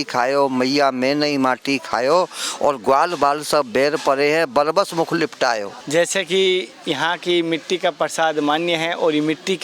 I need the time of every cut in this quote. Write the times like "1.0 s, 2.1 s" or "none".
5.7 s